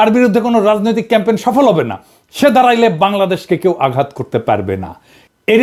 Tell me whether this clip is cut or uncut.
uncut